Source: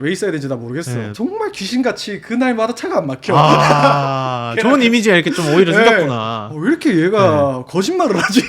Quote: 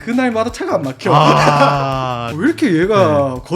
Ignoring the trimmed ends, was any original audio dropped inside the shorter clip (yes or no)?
yes